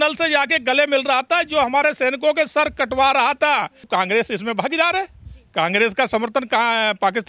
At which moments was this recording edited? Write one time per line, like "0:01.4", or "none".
0:03.9